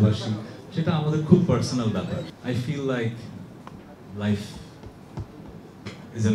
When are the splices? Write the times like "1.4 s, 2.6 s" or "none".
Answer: 2.3 s